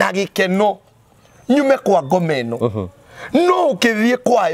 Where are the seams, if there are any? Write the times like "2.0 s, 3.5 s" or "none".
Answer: none